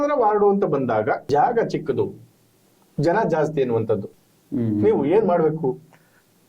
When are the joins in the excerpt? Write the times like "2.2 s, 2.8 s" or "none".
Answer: 1.2 s